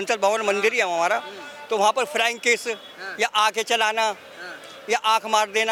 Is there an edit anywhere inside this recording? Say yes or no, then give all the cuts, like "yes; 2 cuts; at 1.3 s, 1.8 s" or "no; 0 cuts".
no; 0 cuts